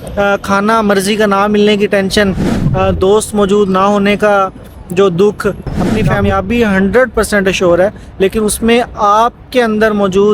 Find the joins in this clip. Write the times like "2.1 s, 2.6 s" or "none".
6.2 s